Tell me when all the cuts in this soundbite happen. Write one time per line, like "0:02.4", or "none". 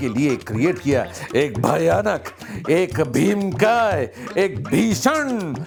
none